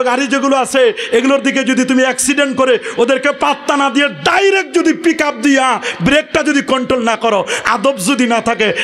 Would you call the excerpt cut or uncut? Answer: uncut